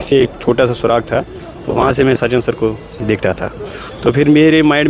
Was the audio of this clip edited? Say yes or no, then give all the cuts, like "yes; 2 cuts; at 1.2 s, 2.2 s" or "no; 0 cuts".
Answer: yes; 1 cut; at 3.0 s